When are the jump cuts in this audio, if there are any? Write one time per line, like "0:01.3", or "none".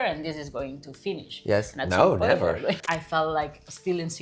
0:02.8